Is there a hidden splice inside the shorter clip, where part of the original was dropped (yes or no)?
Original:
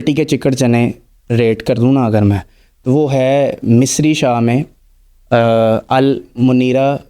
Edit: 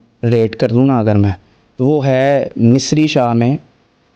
no